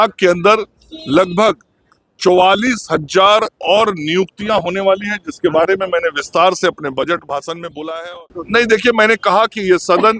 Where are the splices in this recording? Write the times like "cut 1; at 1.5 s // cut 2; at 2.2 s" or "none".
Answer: cut 1; at 8.0 s